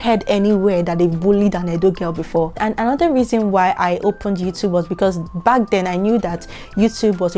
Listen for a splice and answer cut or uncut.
uncut